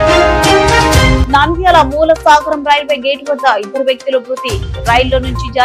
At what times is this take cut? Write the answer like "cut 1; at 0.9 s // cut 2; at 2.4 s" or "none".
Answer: cut 1; at 1.2 s